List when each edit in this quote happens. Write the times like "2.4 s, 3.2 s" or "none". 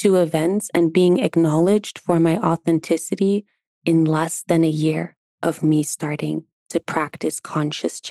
3.6 s